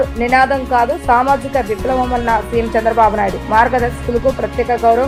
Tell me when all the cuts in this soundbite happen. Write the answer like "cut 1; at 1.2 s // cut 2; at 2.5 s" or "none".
none